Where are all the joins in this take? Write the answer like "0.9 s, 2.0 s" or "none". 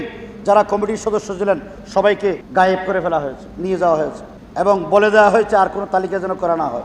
2.4 s